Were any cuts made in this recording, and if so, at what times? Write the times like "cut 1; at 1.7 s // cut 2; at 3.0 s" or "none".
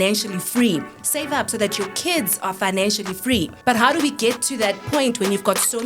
cut 1; at 3.5 s // cut 2; at 4.8 s

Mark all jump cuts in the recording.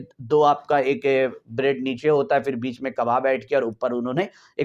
none

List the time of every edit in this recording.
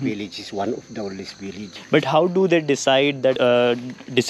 cut 1; at 1.7 s // cut 2; at 3.4 s

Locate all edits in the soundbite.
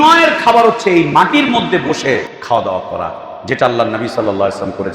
cut 1; at 2.3 s

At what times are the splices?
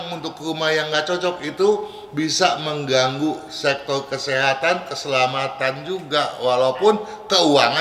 none

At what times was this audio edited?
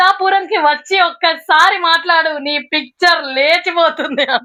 none

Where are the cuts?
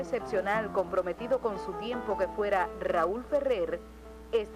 none

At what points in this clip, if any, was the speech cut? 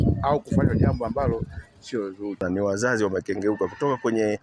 cut 1; at 2.4 s

